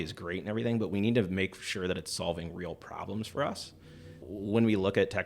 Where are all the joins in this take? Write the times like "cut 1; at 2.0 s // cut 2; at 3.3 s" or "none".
cut 1; at 4.2 s